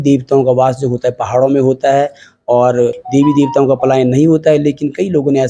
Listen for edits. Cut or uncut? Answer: cut